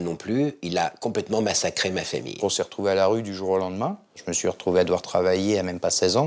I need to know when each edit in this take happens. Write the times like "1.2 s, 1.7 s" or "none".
2.4 s, 4.3 s